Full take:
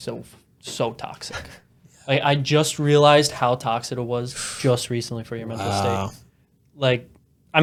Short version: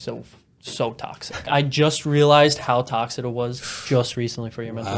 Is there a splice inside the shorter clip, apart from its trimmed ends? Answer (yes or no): yes